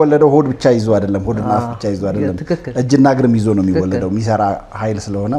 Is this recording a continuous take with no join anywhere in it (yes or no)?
yes